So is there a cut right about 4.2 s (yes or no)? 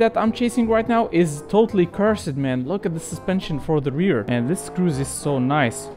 yes